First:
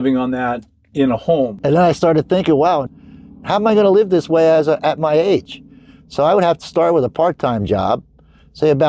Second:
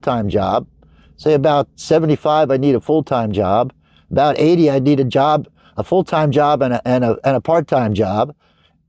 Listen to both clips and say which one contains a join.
first; 2 cuts; at 1.6 s, 2.8 s

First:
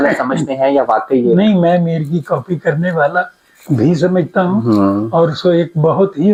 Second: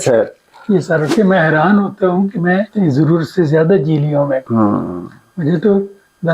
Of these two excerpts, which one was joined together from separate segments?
second; 3 cuts; at 1.1 s, 2.7 s, 4.4 s

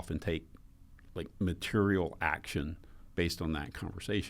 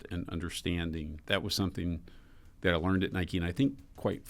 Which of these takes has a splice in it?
second; 1 cut; at 1.2 s

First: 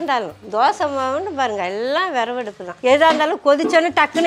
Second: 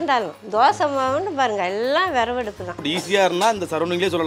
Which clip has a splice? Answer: second; 1 cut; at 2.8 s

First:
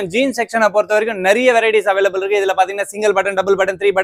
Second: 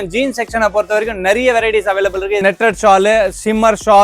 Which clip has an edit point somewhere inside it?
second; 1 cut; at 2.4 s

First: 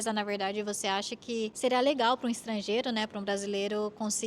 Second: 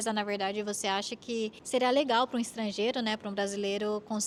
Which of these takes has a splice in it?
first; 1 cut; at 1.5 s

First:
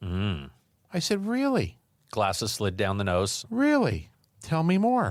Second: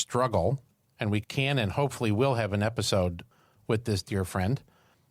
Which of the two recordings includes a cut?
second; 1 cut; at 1.2 s

